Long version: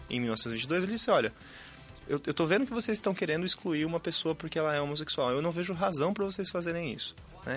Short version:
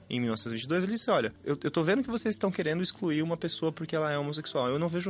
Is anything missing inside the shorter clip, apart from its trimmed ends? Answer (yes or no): yes